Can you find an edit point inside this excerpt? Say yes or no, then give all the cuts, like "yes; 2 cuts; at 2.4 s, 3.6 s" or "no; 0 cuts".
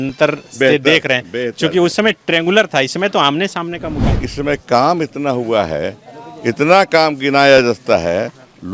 yes; 1 cut; at 4.1 s